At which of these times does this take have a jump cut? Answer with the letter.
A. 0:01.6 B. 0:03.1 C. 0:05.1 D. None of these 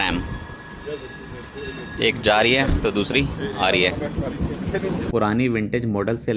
C